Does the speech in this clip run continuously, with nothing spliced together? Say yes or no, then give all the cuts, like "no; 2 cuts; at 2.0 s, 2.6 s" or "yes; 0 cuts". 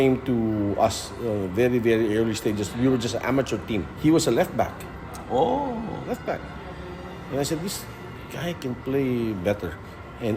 no; 1 cut; at 3.9 s